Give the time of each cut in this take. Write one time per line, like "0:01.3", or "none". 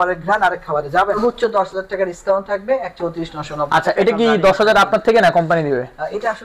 0:01.2